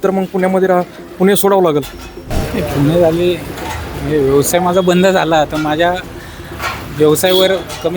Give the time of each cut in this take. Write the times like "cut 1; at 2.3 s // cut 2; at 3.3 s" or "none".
cut 1; at 2.1 s